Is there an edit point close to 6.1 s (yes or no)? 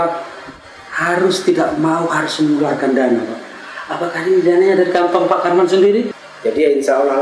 yes